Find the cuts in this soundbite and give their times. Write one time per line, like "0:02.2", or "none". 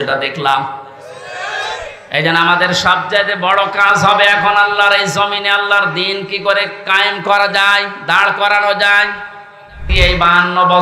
0:09.9